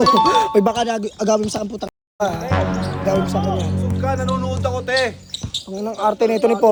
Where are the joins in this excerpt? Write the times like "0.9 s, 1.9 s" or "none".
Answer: none